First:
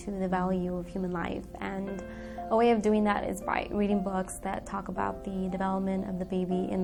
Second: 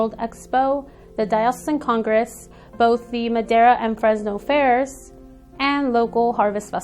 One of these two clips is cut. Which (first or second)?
second